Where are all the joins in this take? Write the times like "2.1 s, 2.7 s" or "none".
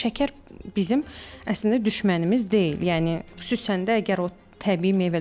none